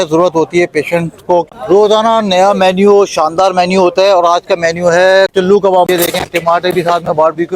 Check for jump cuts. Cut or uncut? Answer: cut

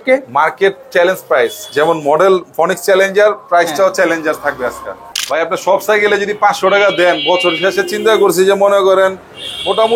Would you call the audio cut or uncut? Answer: cut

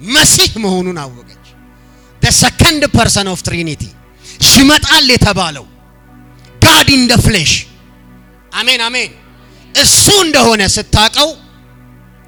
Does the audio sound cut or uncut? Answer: uncut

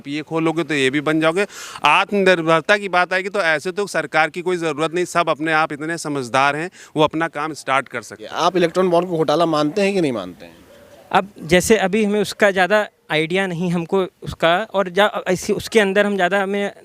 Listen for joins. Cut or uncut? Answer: cut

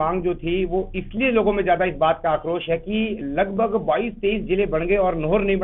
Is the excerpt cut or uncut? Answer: uncut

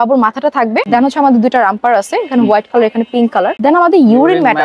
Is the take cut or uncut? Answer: cut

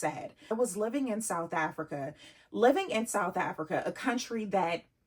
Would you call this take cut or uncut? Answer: cut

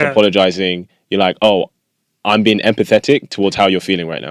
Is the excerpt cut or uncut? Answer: uncut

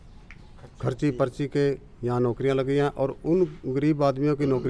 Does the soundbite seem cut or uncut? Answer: uncut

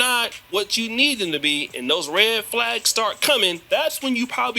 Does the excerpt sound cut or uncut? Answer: cut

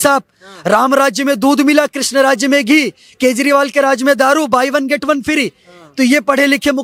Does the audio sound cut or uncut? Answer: uncut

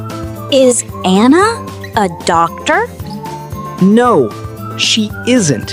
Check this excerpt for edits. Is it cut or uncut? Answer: uncut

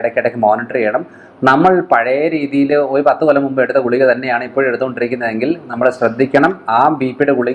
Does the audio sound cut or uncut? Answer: uncut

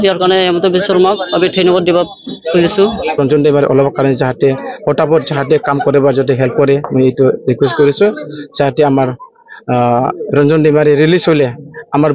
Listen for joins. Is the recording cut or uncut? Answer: cut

